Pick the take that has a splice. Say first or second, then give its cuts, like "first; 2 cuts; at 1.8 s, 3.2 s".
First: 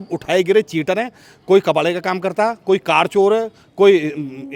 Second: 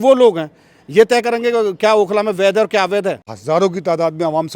second; 1 cut; at 3.3 s